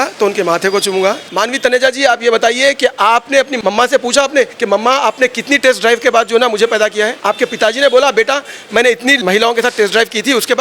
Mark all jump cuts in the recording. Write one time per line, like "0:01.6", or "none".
0:01.3
0:03.5
0:04.6
0:07.2
0:09.2